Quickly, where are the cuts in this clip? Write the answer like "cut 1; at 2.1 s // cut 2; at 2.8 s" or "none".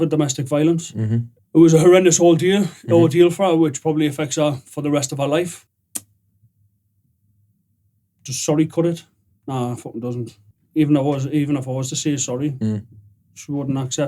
cut 1; at 1.3 s // cut 2; at 5.6 s // cut 3; at 10.4 s